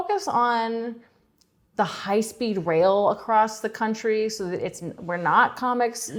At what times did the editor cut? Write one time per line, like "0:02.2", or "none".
none